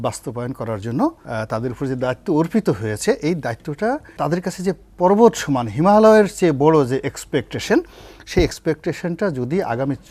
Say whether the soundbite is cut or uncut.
cut